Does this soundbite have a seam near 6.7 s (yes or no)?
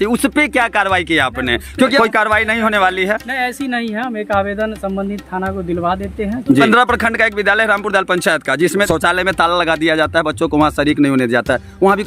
yes